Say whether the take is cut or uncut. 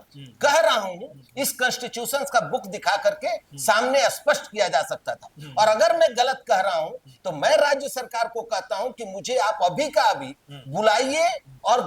uncut